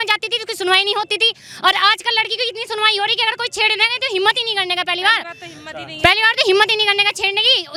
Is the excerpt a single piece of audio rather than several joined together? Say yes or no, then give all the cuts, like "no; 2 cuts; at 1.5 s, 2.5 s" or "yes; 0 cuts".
yes; 0 cuts